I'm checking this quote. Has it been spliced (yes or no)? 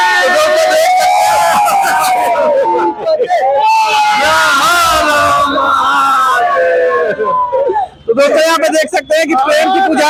no